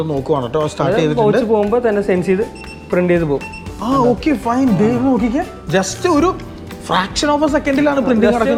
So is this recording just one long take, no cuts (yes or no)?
yes